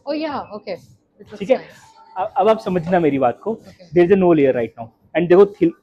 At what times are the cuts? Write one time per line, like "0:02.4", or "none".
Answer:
none